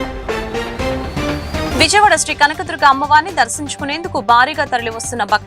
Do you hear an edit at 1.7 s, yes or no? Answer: yes